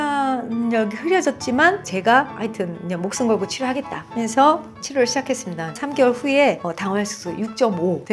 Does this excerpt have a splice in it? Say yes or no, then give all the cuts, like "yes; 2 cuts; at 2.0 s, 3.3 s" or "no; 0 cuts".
yes; 2 cuts; at 1.8 s, 5.8 s